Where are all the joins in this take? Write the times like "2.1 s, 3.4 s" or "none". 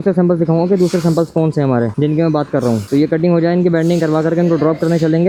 none